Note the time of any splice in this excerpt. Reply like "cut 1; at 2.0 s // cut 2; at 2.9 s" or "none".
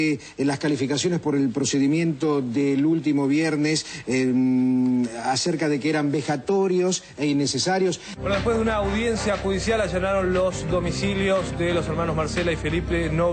none